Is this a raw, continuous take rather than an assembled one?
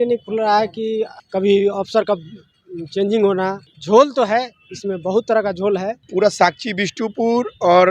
no; 3 cuts; at 1.2 s, 3.7 s, 6.0 s

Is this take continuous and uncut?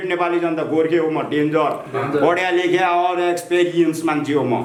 yes; 0 cuts

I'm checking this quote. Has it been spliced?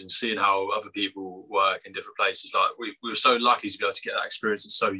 no; 0 cuts

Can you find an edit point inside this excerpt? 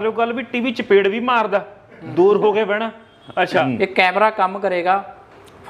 yes; 1 cut; at 3.6 s

